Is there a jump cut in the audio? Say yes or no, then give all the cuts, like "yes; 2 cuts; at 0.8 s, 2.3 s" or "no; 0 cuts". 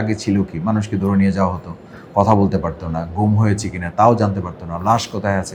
no; 0 cuts